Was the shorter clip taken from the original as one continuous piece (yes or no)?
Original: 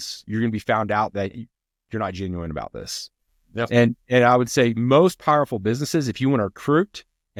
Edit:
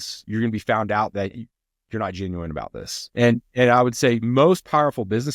no